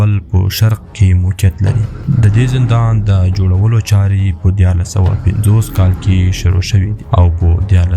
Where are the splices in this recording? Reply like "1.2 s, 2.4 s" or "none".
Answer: 1.9 s, 7.0 s